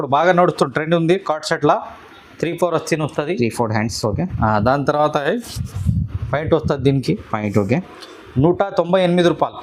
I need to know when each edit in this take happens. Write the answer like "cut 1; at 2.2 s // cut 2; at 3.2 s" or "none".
none